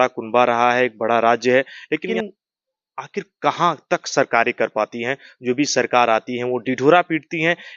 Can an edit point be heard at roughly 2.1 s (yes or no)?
yes